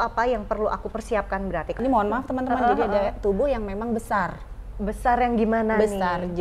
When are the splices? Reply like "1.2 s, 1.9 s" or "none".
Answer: 1.8 s